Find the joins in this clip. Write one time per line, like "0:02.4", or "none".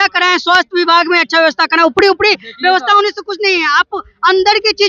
none